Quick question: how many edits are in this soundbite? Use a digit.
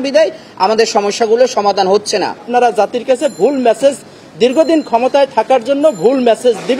1